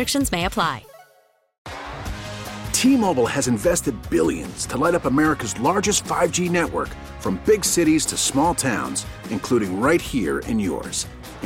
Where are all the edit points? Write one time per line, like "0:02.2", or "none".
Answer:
0:01.6